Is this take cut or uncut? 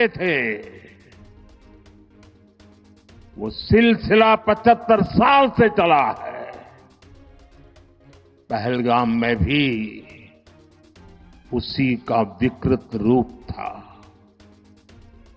cut